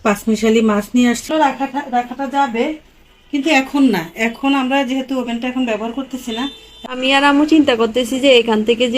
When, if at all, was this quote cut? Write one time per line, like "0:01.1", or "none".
0:01.2
0:06.7